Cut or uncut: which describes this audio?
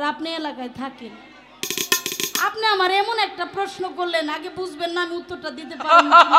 uncut